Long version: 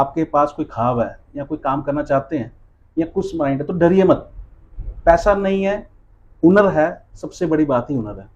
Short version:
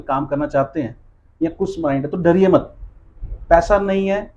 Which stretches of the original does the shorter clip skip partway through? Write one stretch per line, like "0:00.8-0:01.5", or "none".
none